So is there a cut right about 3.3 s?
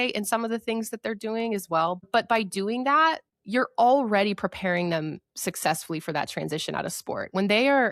yes; 2 cuts; at 2.0 s, 3.3 s

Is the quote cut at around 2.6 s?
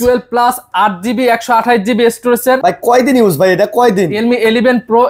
yes; 2 cuts; at 2.6 s, 4.1 s

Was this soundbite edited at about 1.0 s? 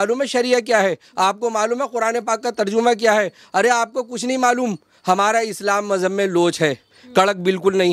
no; 0 cuts

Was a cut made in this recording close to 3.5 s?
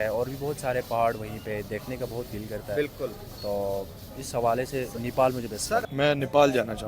no; 1 cut; at 5.9 s

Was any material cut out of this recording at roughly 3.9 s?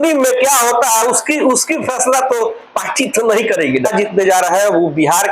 yes; 1 cut; at 3.9 s

